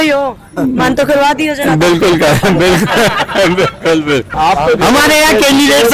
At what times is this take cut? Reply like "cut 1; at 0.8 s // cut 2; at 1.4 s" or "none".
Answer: none